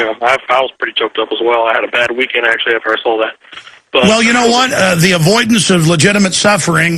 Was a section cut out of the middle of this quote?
no; 0 cuts

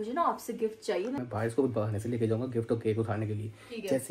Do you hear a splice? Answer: yes; 1 cut; at 1.2 s

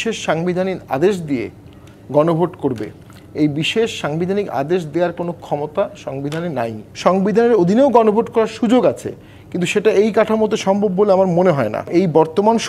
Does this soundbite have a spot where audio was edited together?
yes; 2 cuts; at 6.8 s, 11.9 s

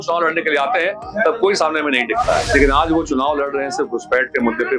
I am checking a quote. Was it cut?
yes; 1 cut; at 2.5 s

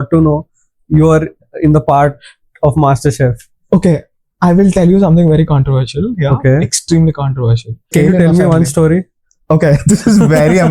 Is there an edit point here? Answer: yes; 1 cut; at 7.9 s

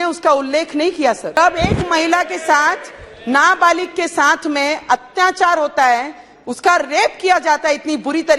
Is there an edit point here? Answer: yes; 1 cut; at 1.4 s

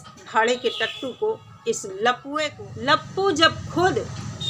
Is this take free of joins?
no; 1 cut; at 2.5 s

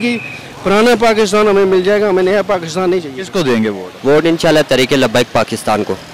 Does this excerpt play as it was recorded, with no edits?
no; 1 cut; at 3.2 s

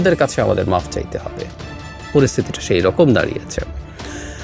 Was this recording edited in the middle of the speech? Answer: no; 0 cuts

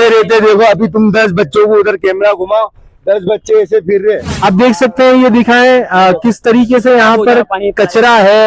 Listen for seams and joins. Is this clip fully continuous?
no; 1 cut; at 4.4 s

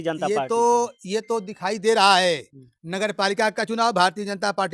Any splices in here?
no; 0 cuts

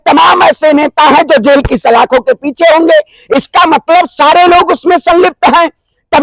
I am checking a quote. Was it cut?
no; 0 cuts

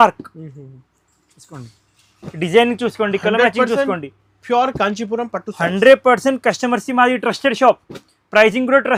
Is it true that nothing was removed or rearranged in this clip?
yes; 0 cuts

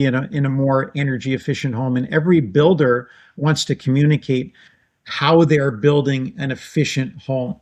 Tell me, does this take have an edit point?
no; 0 cuts

